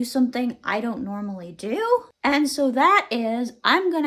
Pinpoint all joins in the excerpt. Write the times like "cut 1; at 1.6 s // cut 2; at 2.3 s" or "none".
cut 1; at 2.1 s